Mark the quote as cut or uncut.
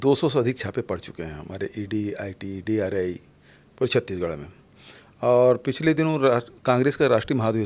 uncut